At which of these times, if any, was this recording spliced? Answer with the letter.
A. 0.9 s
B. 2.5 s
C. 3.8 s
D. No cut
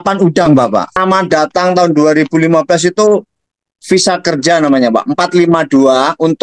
A